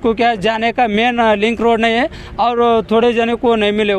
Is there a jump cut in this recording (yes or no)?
no